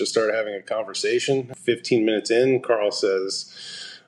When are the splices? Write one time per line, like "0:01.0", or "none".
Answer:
0:01.5